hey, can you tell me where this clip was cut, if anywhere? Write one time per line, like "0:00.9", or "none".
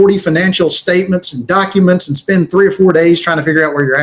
none